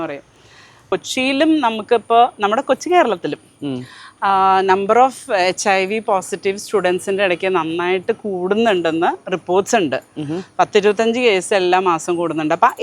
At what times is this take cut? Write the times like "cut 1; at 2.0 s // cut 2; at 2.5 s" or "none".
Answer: cut 1; at 0.9 s